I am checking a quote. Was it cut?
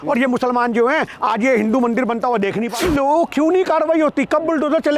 yes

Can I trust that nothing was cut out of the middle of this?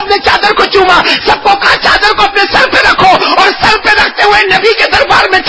yes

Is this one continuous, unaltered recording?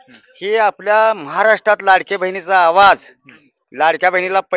yes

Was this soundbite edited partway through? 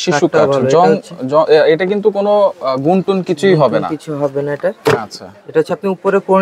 no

